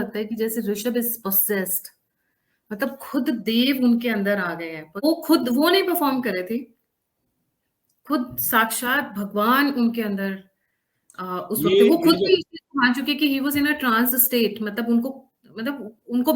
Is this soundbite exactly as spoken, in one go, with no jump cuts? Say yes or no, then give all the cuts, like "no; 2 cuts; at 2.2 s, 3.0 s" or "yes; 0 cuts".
no; 1 cut; at 5.0 s